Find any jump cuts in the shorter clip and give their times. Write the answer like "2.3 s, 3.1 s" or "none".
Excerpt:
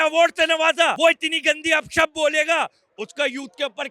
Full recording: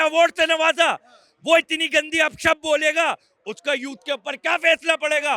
1.0 s